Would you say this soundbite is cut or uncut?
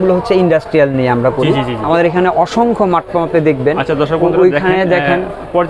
cut